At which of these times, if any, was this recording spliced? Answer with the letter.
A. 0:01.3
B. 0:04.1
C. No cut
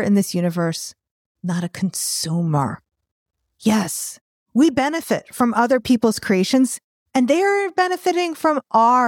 B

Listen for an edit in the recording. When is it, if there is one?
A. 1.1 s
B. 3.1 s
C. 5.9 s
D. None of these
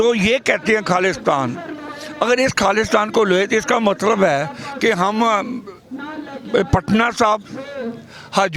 D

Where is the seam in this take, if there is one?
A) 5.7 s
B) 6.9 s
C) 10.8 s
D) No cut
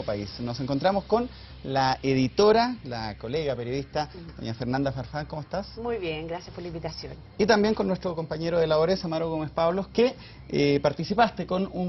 C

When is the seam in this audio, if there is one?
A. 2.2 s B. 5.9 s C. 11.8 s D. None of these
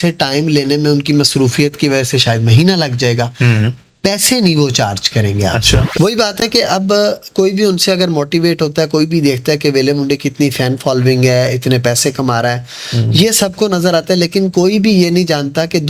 B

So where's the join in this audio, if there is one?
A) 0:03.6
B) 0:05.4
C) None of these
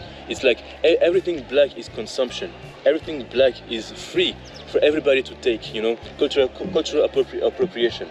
C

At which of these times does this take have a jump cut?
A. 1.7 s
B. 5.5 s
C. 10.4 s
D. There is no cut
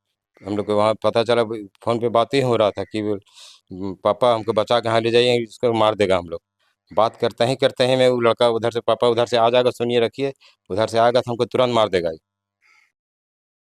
D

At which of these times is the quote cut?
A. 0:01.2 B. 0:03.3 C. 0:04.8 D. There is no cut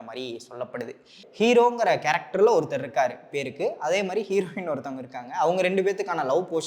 A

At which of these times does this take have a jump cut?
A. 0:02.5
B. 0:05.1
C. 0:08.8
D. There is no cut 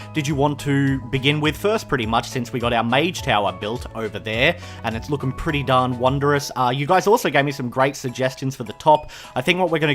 A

